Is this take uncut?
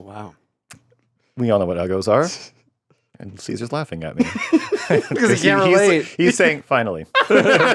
yes; 0 cuts

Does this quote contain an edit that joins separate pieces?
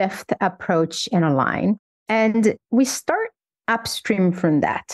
yes; 3 cuts; at 1.9 s, 2.6 s, 4.2 s

